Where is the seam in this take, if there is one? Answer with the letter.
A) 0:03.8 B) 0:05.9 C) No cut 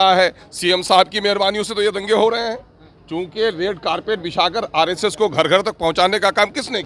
C